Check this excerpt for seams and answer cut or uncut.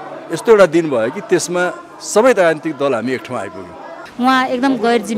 cut